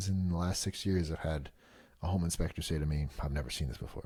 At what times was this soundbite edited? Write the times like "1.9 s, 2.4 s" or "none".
none